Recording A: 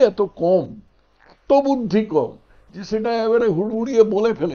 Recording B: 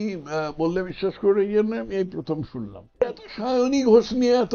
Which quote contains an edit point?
B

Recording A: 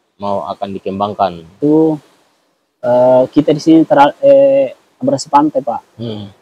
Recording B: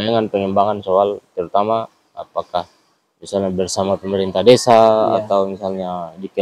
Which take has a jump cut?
A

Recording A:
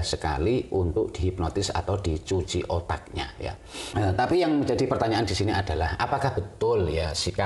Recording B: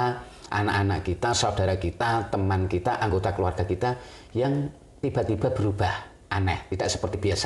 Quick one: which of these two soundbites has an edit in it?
A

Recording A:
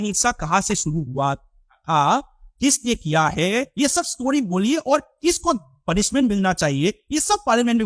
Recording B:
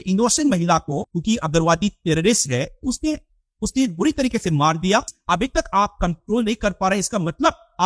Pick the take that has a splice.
B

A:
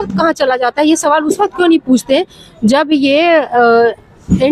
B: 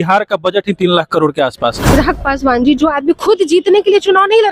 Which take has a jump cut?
B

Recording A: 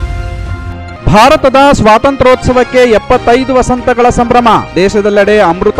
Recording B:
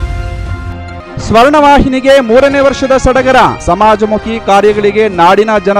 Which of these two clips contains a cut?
A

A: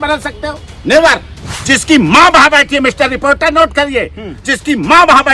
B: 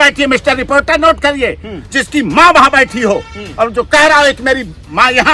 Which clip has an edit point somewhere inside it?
A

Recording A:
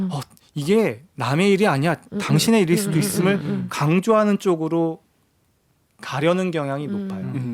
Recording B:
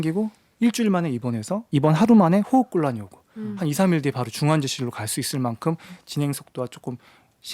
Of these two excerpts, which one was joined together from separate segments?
B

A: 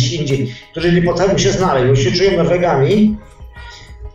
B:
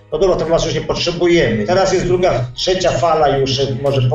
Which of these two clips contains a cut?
B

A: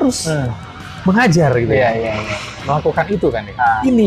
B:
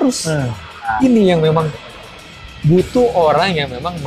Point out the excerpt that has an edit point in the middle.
B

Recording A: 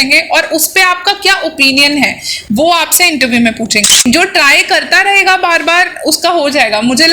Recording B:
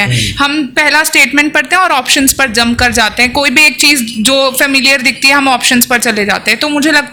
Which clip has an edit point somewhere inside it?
A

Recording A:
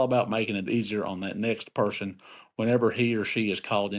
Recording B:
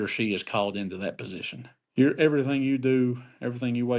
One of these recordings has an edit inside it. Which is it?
B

